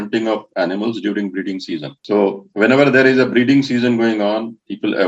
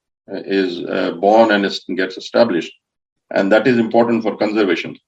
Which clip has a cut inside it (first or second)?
first